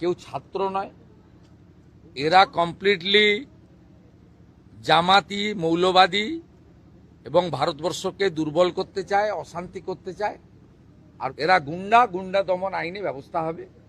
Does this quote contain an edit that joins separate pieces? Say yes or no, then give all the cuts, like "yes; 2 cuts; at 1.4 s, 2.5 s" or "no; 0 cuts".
yes; 1 cut; at 11.3 s